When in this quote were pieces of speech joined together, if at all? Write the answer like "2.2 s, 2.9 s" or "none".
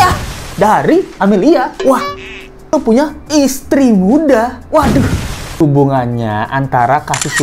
2.7 s, 5.6 s